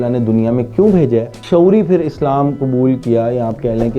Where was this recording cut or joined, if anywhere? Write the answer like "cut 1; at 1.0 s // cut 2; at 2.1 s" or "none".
cut 1; at 1.4 s